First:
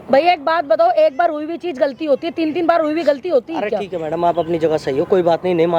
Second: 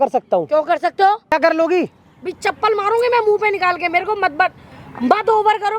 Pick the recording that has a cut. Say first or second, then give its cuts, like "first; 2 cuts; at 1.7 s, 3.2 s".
second; 1 cut; at 1.3 s